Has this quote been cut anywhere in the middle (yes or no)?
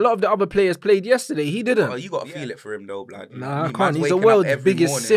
yes